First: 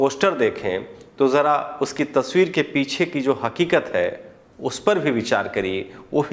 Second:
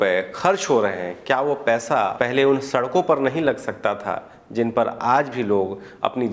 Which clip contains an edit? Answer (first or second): second